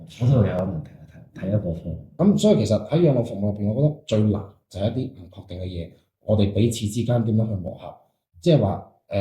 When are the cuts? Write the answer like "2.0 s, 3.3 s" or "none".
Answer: 2.0 s